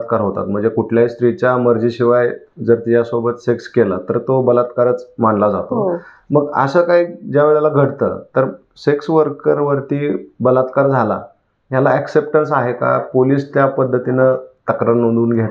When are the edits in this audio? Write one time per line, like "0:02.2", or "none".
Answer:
none

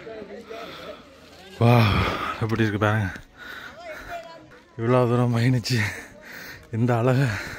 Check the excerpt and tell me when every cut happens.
0:04.6

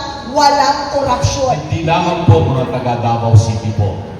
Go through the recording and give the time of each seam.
0:01.7

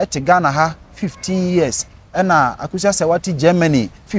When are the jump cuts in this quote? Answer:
none

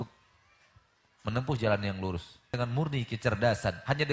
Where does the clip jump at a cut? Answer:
0:02.5

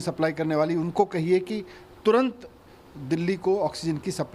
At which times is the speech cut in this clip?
none

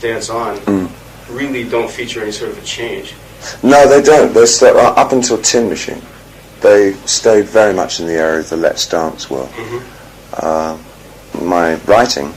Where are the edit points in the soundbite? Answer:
none

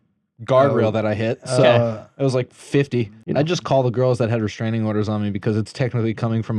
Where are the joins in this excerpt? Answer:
0:03.2

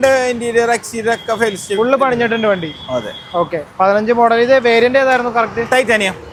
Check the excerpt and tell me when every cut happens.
none

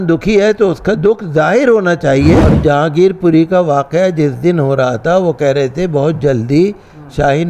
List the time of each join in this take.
0:02.5

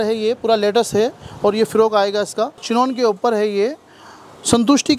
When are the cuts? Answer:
0:02.6

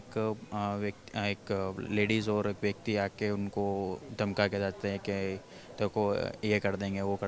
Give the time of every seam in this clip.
none

